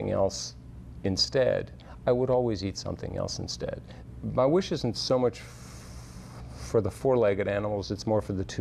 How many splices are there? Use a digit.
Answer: 1